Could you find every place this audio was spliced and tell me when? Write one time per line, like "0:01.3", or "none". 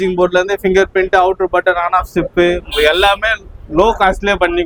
none